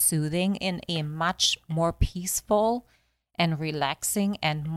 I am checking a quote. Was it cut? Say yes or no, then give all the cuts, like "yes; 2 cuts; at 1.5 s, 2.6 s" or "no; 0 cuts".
no; 0 cuts